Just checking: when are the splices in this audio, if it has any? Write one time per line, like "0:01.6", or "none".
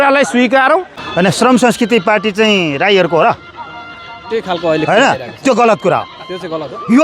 0:01.0